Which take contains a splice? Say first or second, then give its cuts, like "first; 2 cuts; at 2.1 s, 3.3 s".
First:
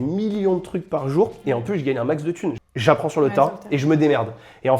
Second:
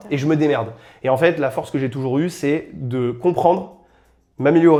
first; 1 cut; at 2.7 s